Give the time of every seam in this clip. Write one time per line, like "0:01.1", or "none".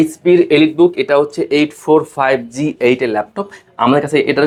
none